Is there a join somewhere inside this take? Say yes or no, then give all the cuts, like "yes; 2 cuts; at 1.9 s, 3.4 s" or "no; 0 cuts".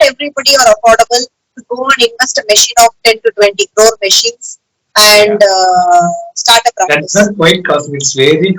no; 0 cuts